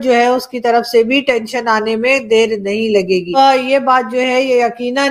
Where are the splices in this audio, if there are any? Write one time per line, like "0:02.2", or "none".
0:03.3